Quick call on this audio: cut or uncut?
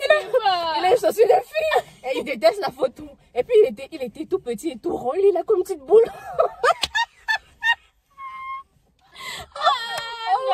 uncut